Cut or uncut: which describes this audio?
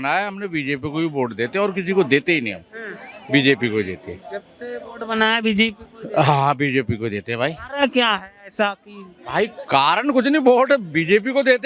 uncut